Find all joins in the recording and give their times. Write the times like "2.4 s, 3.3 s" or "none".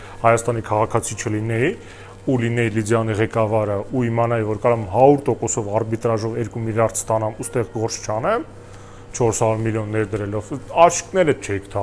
none